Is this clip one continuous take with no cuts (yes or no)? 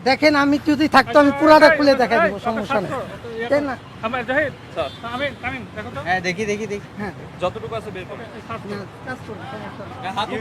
yes